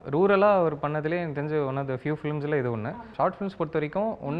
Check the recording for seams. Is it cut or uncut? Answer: cut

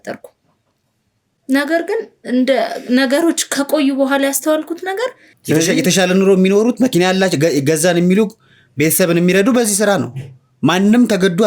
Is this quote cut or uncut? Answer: cut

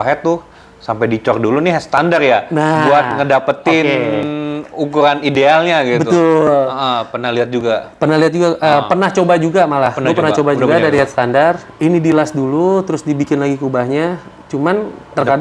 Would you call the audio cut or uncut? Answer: uncut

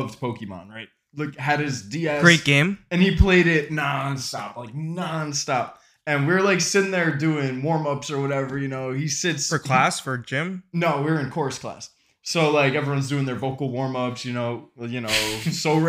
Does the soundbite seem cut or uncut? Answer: uncut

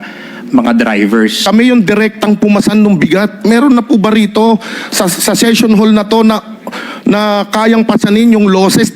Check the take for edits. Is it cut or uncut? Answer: cut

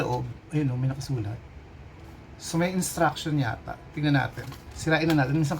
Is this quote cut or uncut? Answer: uncut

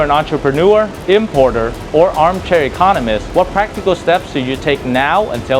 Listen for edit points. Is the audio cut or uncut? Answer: cut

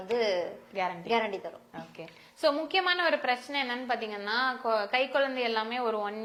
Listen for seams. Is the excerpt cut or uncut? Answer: uncut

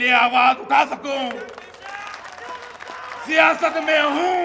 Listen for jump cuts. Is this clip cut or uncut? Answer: uncut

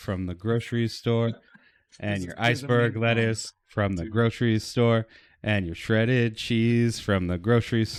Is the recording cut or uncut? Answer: uncut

